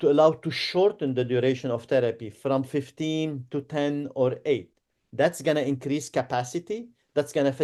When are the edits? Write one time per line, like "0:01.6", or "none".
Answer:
none